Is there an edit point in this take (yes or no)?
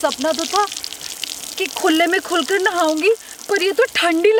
no